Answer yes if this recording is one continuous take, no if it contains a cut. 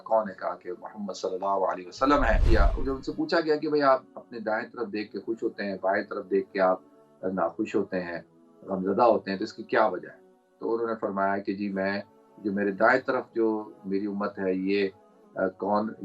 no